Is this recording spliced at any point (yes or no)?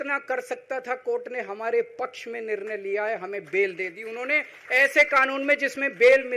no